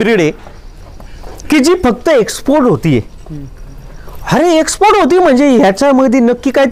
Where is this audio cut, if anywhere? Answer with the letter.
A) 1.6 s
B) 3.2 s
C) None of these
C